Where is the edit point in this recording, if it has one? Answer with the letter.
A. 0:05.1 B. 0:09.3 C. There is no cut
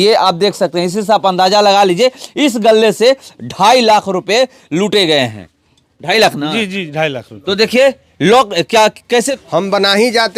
B